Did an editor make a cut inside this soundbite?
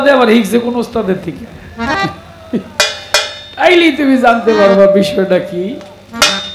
no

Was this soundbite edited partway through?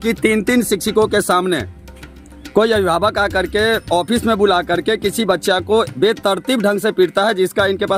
no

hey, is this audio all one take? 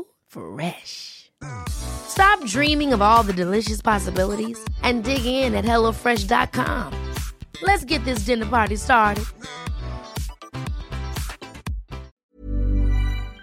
no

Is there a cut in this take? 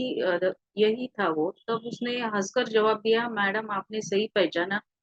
no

